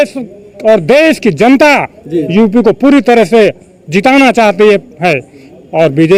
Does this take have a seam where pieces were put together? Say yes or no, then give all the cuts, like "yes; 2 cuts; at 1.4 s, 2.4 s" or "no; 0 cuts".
no; 0 cuts